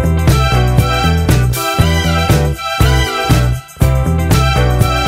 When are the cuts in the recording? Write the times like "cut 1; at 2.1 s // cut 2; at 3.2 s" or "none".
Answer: none